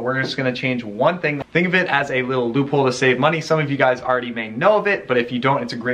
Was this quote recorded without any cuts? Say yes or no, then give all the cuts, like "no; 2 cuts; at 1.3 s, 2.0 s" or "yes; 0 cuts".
yes; 0 cuts